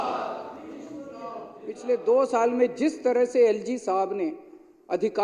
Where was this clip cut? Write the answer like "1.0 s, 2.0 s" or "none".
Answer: 1.7 s